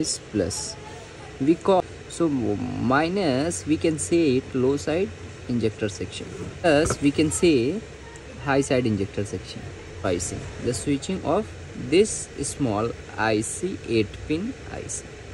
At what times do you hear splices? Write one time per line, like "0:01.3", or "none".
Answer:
0:01.8
0:06.6
0:10.0

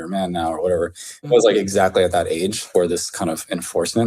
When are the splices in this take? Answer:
0:01.1
0:02.7

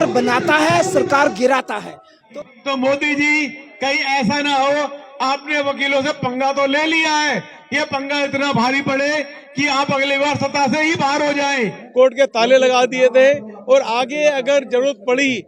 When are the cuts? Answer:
0:02.2
0:11.8

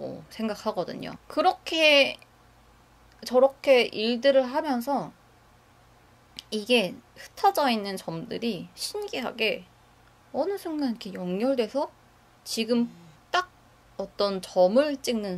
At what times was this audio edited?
0:01.2

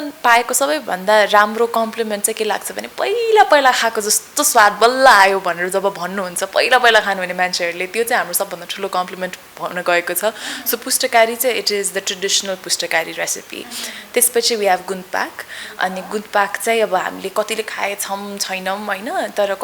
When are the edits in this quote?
none

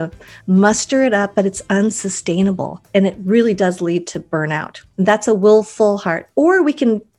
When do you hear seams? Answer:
0:02.7
0:04.8

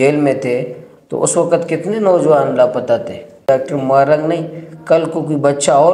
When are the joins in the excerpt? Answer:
0:03.4

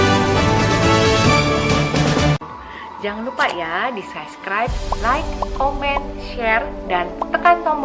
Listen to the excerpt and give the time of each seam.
none

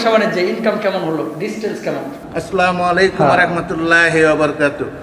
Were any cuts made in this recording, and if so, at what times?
0:02.2

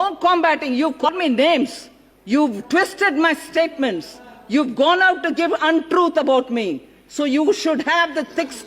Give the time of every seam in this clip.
0:01.1

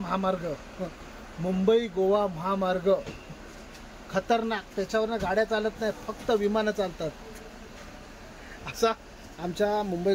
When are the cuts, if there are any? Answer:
none

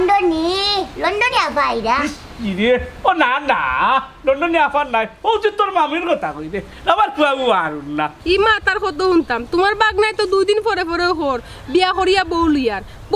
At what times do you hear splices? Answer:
0:08.2

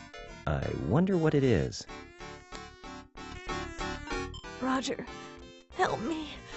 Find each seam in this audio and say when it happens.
0:01.0

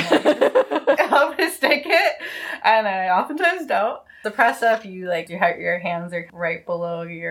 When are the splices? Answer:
0:01.0
0:04.2
0:05.3
0:06.3

